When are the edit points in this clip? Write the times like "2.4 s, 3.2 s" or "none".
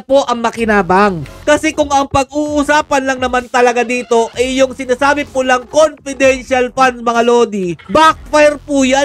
1.4 s, 7.8 s